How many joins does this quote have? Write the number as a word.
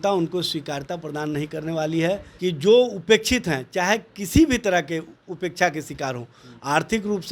one